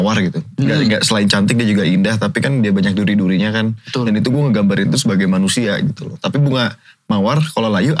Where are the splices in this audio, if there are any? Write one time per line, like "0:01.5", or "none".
0:06.1